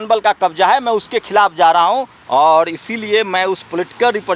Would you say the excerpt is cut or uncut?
cut